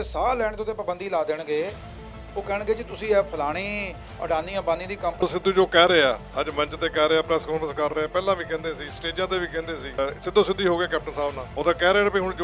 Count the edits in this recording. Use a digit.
3